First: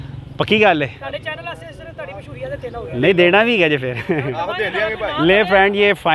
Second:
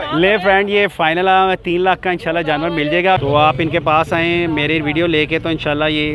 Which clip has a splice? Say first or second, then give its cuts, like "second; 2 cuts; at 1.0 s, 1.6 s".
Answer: second; 1 cut; at 3.2 s